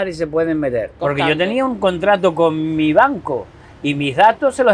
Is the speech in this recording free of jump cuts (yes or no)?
no